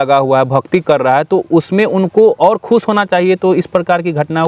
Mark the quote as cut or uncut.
uncut